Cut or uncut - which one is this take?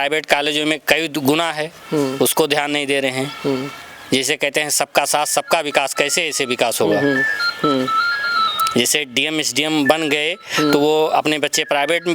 uncut